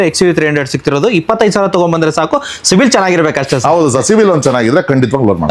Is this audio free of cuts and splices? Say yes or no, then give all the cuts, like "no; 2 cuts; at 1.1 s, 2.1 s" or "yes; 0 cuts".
yes; 0 cuts